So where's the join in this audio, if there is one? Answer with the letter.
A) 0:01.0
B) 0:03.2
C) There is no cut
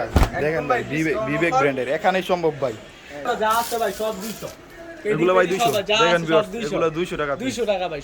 B